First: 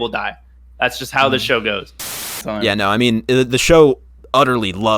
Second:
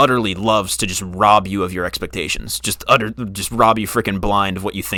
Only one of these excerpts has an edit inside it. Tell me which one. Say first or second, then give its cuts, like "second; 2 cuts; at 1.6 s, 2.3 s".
first; 1 cut; at 2.4 s